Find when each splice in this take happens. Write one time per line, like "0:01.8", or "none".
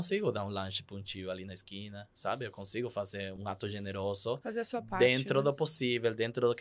0:03.4